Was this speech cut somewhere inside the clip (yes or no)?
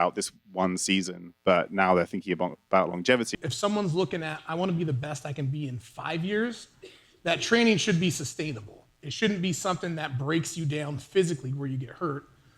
yes